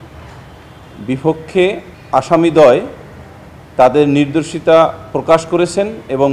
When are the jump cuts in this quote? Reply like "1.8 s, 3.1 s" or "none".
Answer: 1.9 s